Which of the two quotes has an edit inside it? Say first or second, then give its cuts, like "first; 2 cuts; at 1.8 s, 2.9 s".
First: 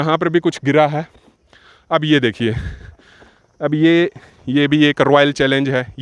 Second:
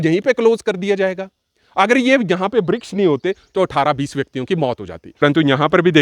second; 1 cut; at 5.0 s